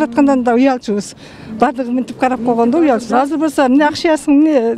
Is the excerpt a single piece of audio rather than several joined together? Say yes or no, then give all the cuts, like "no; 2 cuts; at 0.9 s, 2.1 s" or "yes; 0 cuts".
yes; 0 cuts